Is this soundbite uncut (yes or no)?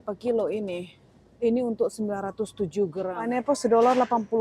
no